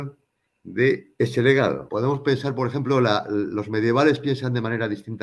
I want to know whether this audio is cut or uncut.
cut